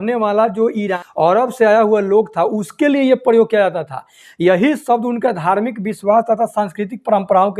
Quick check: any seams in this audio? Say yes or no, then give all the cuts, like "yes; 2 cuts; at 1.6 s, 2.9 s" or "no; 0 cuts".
yes; 1 cut; at 1.0 s